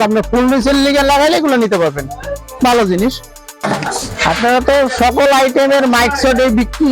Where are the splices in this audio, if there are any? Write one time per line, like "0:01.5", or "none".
0:03.7